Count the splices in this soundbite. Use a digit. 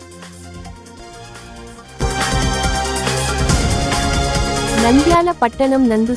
1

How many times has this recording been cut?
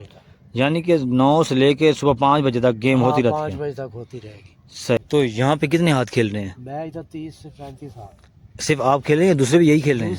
1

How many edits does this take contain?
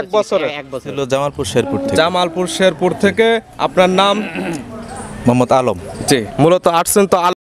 1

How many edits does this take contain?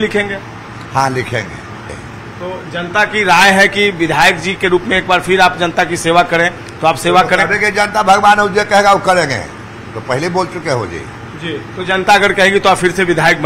1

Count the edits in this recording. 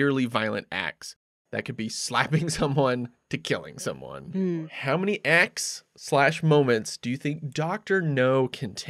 1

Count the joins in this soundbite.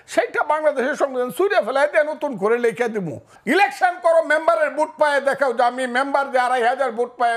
1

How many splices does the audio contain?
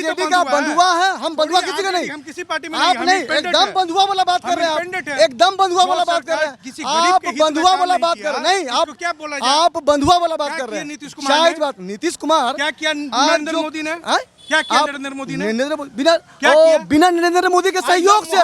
0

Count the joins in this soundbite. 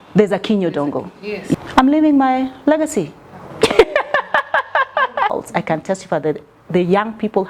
2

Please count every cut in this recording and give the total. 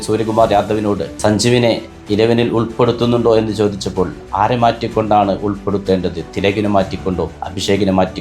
1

